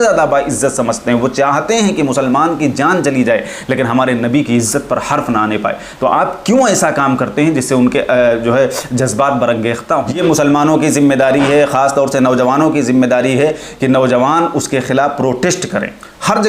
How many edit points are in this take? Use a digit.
1